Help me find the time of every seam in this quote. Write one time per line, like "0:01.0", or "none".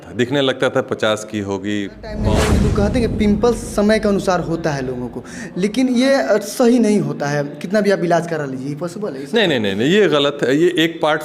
0:02.5